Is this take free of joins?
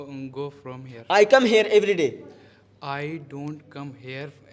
yes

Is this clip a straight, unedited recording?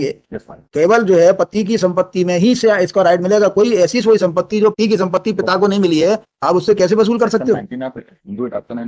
yes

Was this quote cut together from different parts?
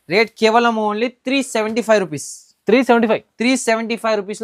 no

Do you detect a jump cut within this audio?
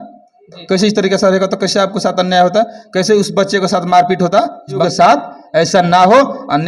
yes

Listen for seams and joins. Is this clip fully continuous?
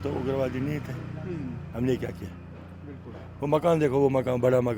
yes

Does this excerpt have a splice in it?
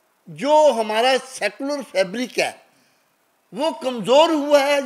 no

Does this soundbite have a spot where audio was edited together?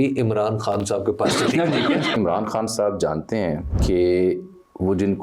yes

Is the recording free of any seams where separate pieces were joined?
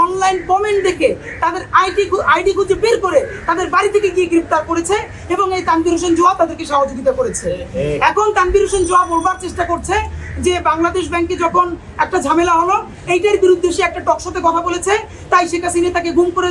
yes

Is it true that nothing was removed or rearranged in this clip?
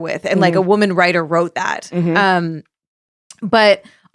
yes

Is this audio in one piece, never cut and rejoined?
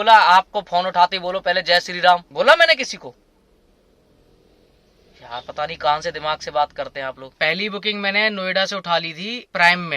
yes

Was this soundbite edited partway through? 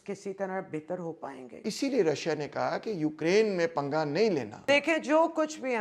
yes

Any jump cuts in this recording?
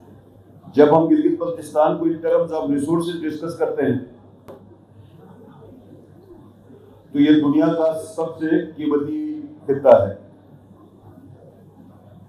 no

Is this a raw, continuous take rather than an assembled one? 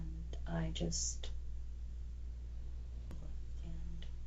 no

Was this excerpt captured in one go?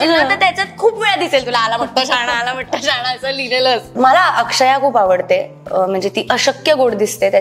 no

